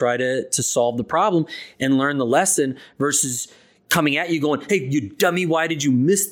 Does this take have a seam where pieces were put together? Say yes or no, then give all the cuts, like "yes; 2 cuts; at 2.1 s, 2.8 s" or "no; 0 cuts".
no; 0 cuts